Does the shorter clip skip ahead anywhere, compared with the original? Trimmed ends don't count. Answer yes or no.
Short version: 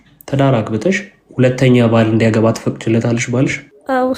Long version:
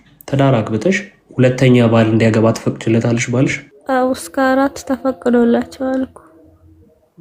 no